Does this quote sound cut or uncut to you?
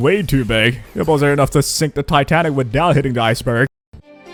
uncut